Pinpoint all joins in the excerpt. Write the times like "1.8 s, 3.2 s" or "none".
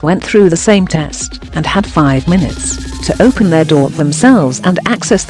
none